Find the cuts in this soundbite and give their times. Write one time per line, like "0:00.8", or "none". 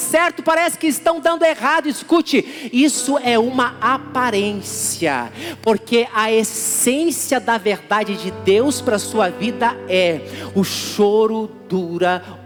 none